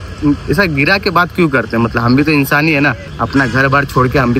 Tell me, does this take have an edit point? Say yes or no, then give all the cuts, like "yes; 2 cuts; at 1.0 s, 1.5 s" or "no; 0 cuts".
yes; 1 cut; at 3.1 s